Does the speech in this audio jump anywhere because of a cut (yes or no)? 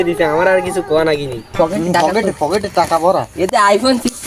yes